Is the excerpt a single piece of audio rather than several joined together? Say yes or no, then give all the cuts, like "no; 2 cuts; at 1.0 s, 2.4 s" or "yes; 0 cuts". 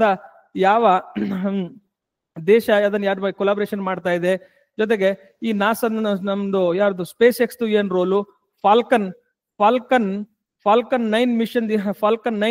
yes; 0 cuts